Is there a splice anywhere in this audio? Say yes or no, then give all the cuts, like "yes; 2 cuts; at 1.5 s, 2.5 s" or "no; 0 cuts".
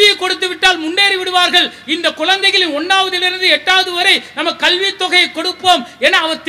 no; 0 cuts